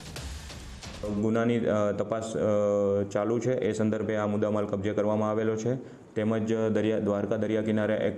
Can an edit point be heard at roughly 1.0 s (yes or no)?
yes